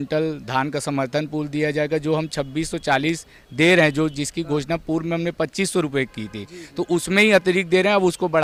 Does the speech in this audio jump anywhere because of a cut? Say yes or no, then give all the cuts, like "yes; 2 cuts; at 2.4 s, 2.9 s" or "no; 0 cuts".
no; 0 cuts